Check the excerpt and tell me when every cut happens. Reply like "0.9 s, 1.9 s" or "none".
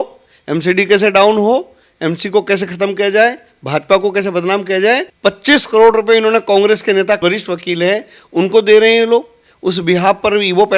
5.1 s, 7.2 s